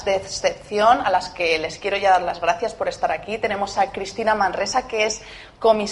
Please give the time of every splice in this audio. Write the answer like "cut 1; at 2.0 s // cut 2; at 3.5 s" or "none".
none